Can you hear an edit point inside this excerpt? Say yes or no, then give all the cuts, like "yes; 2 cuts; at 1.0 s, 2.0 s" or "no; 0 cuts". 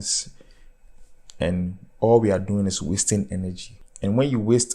yes; 1 cut; at 3.7 s